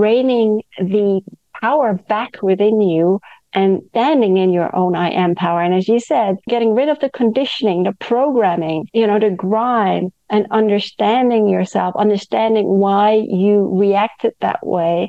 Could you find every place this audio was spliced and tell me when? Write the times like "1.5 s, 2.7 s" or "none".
3.9 s, 6.4 s, 8.8 s

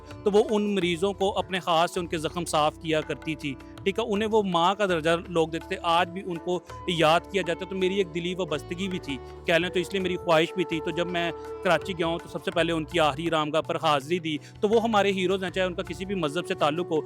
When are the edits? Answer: none

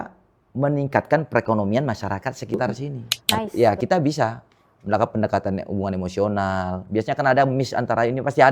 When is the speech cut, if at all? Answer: 3.5 s

